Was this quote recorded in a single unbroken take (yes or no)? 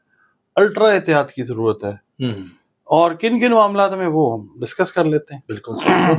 yes